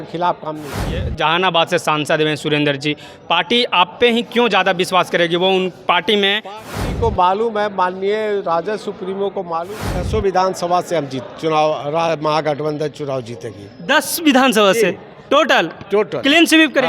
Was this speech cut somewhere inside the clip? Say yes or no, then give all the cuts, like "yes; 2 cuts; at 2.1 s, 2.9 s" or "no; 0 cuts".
yes; 3 cuts; at 1.1 s, 6.7 s, 9.9 s